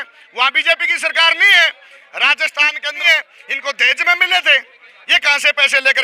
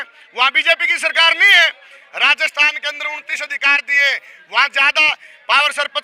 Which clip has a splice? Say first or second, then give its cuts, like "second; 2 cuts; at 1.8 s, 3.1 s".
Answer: first; 1 cut; at 3.0 s